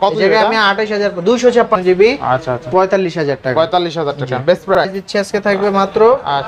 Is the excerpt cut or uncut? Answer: cut